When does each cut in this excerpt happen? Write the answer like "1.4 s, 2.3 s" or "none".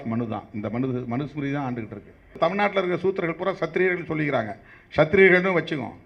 2.3 s